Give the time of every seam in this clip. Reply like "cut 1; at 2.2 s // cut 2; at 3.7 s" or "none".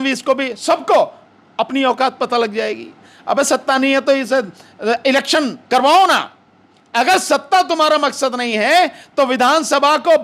cut 1; at 3.1 s